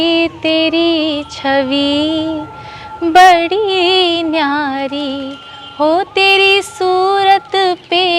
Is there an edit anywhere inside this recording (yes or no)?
no